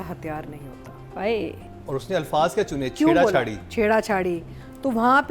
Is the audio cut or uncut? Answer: cut